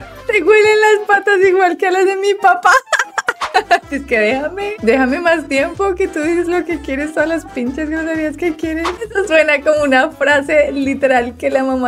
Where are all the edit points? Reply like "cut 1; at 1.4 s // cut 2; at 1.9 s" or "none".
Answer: cut 1; at 3.5 s // cut 2; at 9.0 s